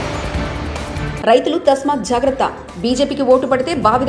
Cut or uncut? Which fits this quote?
uncut